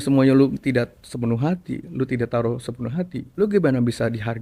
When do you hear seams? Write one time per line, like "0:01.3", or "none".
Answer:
0:03.2